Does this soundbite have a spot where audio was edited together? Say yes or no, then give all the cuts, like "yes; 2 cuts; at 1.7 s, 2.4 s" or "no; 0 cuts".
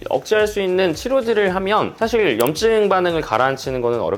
no; 0 cuts